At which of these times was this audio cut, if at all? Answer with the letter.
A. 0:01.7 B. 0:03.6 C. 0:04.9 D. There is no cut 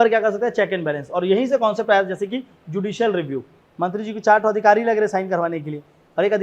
B